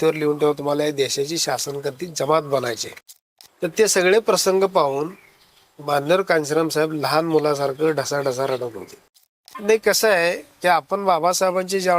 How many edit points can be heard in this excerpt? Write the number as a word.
two